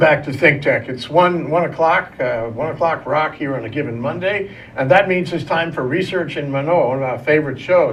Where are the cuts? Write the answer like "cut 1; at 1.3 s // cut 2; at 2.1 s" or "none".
none

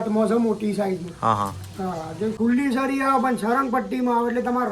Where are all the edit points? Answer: cut 1; at 2.3 s

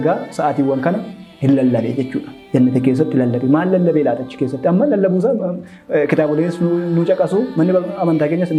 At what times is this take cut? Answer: none

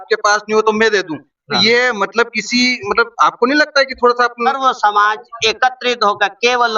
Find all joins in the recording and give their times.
cut 1; at 4.5 s

